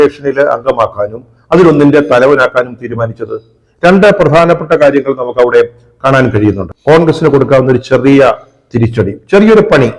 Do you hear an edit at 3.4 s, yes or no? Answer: no